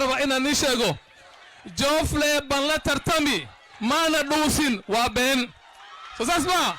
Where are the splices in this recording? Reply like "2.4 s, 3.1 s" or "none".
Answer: none